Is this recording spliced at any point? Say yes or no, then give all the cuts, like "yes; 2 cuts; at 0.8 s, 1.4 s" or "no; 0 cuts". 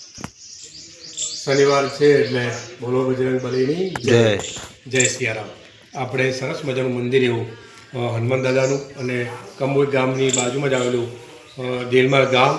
no; 0 cuts